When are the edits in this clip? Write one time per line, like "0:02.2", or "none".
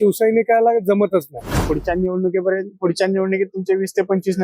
0:01.6